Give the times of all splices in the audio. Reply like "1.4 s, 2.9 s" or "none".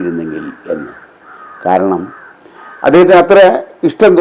none